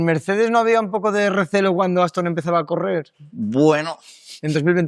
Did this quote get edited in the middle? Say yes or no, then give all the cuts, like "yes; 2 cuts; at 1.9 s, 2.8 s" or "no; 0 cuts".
no; 0 cuts